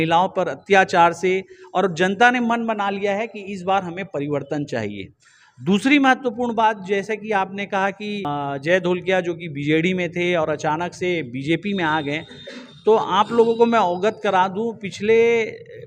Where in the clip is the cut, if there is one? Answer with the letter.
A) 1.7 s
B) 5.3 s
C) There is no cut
C